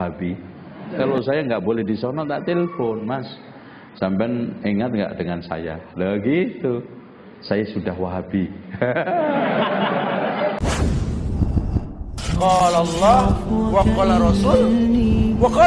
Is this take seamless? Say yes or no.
no